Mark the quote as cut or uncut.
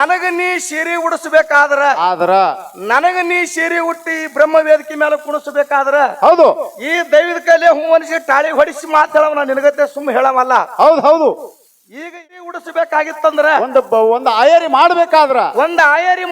cut